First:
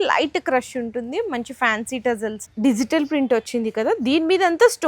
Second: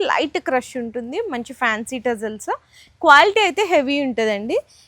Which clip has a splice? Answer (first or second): first